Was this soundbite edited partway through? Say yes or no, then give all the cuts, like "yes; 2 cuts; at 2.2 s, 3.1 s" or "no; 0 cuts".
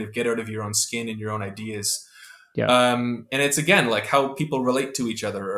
no; 0 cuts